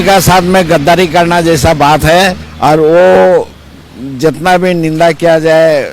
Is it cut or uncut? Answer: cut